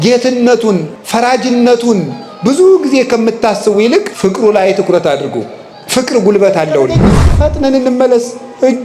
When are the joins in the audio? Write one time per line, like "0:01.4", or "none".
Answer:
0:01.0
0:04.1
0:07.3